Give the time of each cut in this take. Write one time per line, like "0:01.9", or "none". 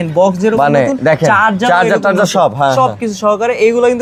none